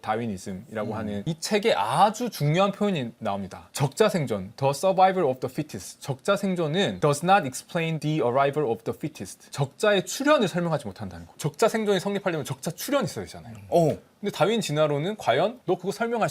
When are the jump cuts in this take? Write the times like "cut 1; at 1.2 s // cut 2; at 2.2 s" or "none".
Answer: cut 1; at 1.2 s